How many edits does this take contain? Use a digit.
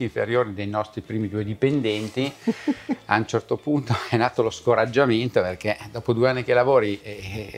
0